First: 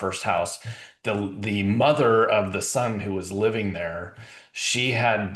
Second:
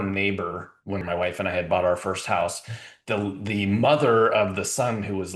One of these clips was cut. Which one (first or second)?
second